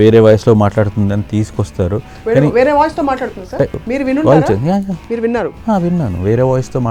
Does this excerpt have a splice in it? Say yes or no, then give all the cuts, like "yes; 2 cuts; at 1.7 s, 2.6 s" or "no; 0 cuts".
yes; 2 cuts; at 3.8 s, 5.0 s